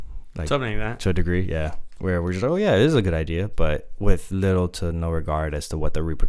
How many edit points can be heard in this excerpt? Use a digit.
1